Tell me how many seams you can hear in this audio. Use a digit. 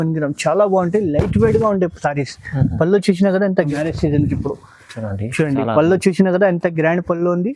1